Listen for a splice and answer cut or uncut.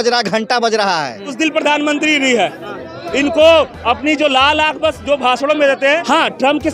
cut